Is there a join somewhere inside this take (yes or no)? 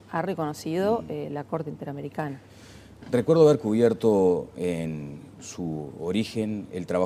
no